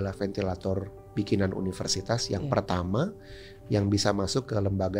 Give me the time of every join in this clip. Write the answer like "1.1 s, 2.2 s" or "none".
none

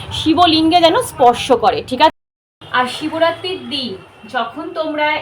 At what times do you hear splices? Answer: 2.1 s

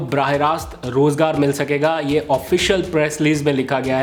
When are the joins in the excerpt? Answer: none

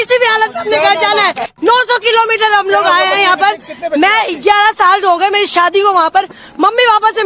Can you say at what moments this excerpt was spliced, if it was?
1.5 s

